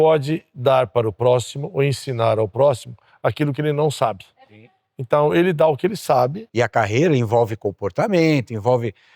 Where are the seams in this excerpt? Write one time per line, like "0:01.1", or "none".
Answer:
0:06.4